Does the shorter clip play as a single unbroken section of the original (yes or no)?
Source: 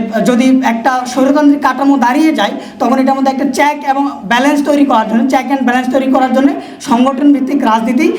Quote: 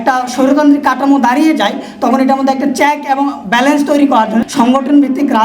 no